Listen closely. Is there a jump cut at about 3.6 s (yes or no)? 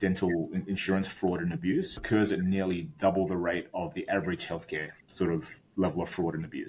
no